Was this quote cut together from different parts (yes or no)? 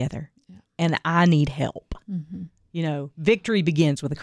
no